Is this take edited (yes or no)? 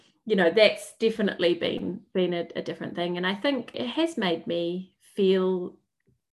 yes